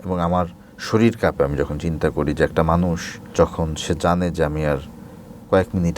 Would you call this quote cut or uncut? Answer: cut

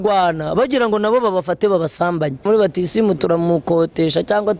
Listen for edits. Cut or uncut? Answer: cut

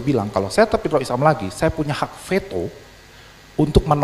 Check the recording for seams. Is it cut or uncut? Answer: uncut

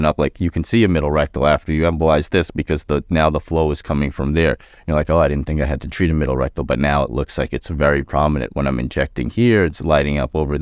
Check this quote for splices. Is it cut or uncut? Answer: uncut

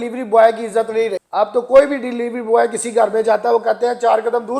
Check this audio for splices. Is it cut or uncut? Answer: uncut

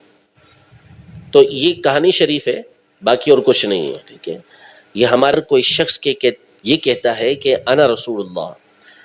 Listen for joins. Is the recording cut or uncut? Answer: cut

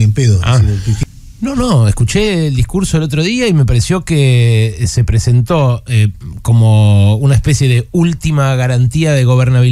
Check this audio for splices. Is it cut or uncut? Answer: cut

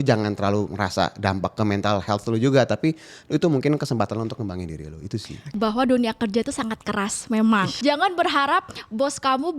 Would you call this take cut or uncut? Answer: cut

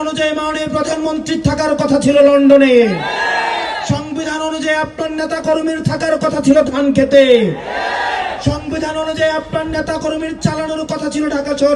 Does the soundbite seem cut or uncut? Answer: uncut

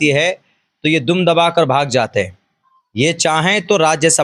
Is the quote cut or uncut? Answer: uncut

